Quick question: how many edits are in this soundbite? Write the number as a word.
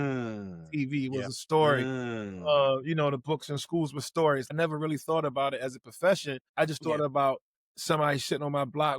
two